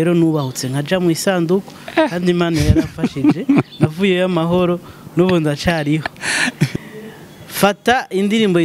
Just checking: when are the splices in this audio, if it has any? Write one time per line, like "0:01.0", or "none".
0:06.7